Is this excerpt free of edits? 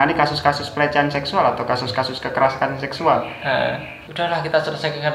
no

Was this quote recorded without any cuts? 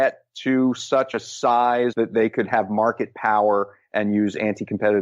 no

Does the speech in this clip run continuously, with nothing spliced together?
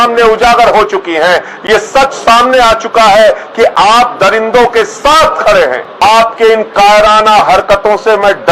no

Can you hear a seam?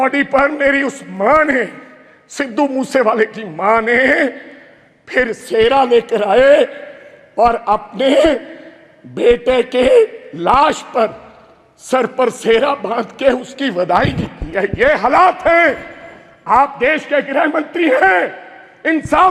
no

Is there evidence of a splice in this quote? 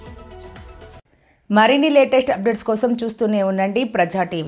no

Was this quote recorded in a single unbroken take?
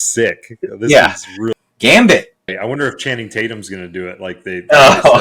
no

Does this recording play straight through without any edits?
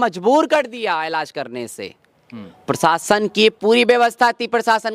yes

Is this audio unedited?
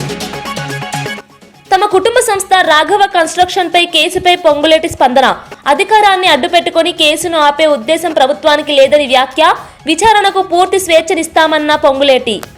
no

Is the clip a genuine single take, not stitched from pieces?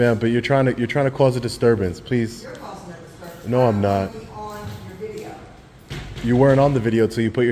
yes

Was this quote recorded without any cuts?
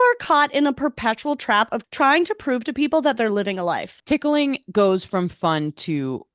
no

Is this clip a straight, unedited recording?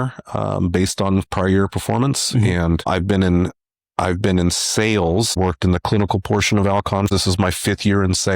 no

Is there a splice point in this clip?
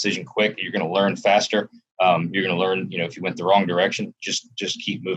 no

